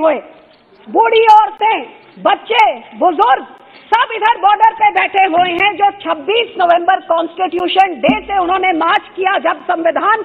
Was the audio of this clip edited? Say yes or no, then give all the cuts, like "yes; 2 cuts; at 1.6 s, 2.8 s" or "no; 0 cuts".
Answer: no; 0 cuts